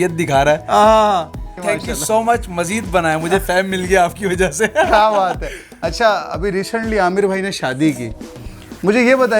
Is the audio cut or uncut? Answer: uncut